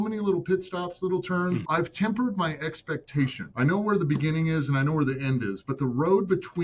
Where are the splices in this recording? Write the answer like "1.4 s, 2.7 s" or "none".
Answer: 1.6 s

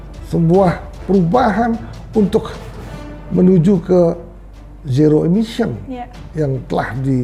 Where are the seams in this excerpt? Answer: none

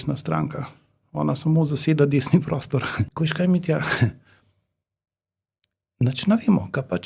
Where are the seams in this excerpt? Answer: 3.1 s

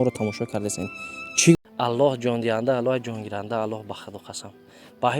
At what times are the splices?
1.5 s

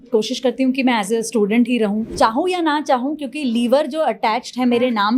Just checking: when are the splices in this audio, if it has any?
2.1 s

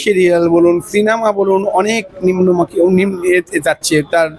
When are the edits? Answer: none

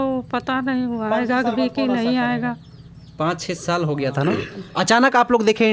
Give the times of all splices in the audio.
none

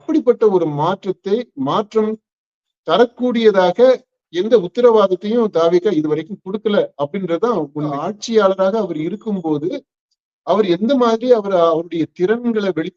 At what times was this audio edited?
8.1 s

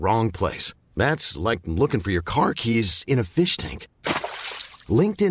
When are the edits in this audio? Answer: none

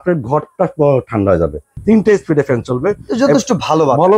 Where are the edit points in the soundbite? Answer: 1.7 s

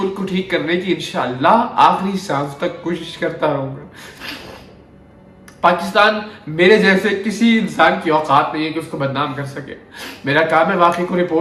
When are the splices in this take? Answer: none

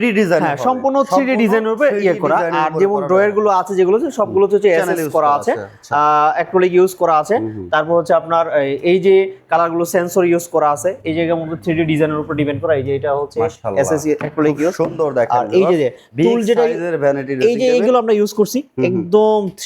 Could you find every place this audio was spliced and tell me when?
none

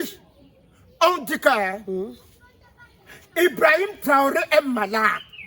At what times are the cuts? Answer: none

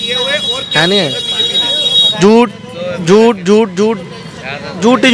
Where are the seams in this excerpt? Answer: none

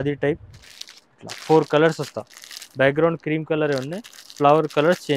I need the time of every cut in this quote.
none

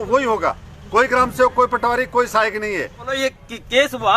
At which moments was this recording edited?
3.1 s

